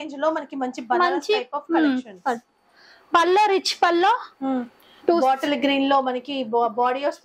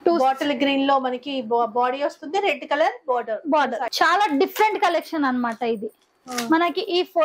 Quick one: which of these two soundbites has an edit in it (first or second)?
second